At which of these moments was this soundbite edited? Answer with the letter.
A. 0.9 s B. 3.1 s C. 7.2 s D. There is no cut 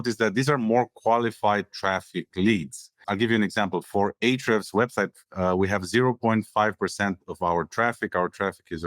B